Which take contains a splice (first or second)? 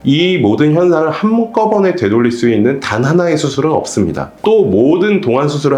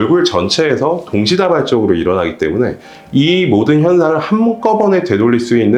first